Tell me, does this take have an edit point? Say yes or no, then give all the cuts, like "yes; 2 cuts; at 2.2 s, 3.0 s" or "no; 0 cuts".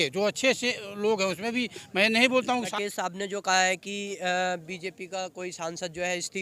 yes; 1 cut; at 2.6 s